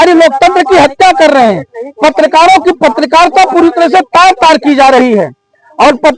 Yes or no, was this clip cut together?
no